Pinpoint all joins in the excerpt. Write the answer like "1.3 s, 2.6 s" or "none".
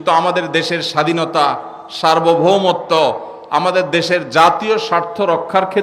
none